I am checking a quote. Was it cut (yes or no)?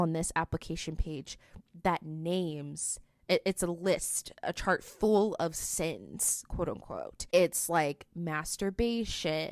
no